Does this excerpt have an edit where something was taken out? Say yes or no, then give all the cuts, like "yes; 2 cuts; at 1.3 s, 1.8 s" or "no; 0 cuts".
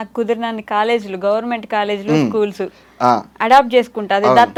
no; 0 cuts